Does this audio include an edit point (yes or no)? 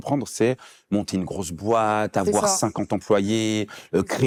no